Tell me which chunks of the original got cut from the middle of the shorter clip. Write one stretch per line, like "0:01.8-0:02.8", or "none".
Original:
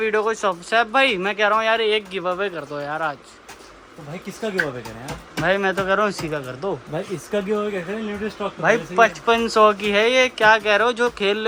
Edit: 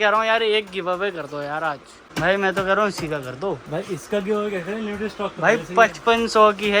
0:03.3-0:05.2